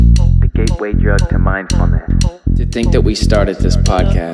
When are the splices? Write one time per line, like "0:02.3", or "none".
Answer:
0:02.7